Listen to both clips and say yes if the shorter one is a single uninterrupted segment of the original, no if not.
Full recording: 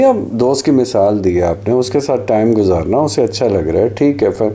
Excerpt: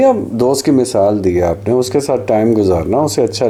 yes